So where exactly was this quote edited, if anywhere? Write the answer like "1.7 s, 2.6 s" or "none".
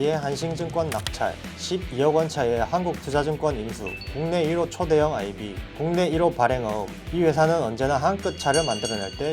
none